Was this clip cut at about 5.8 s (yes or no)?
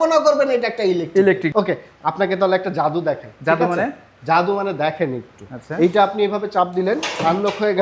no